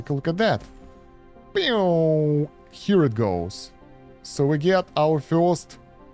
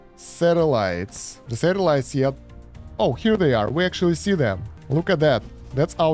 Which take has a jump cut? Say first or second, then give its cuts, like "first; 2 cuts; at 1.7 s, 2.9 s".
second; 1 cut; at 1.5 s